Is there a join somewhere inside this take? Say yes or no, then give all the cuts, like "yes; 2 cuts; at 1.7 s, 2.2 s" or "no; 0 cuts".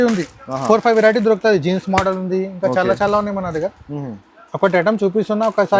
no; 0 cuts